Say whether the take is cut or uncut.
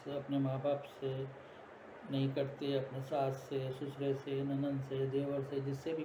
uncut